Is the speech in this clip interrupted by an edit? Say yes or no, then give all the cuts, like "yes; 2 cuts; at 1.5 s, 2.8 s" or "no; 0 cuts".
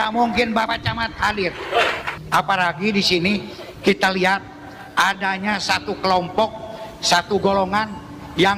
yes; 1 cut; at 2.1 s